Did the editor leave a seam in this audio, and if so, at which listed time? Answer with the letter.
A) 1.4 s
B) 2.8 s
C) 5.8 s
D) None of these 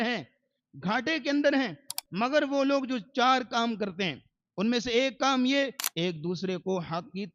C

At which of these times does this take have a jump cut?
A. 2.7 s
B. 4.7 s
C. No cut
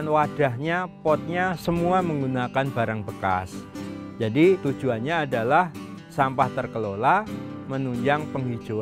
B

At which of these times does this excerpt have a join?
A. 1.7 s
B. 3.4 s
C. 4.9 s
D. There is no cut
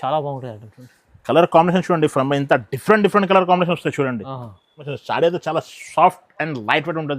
C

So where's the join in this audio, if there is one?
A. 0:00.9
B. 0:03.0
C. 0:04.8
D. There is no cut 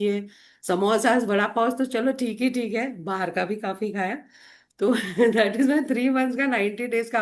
D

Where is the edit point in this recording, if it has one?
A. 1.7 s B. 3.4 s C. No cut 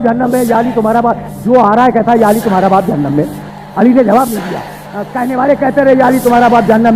B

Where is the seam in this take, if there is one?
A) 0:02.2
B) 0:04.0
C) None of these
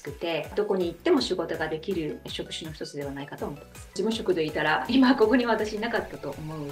B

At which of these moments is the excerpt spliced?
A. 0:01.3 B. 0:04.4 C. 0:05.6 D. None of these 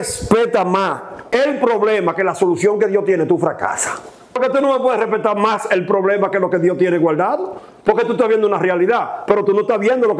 B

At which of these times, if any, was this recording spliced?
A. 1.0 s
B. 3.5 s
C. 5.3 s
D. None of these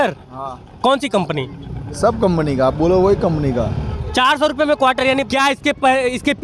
C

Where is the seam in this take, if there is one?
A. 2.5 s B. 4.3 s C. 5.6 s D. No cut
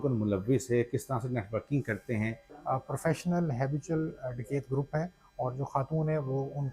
A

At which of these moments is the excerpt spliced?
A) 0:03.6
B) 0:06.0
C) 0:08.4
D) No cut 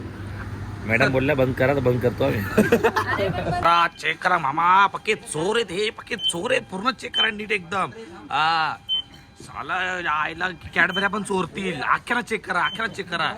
A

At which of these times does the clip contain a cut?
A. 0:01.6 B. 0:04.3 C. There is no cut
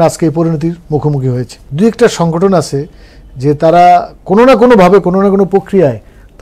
A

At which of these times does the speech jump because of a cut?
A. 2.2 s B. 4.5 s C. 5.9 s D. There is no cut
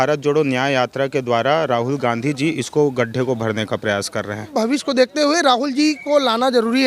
B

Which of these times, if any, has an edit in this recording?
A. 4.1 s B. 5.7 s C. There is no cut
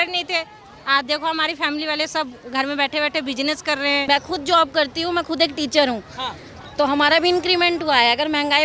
A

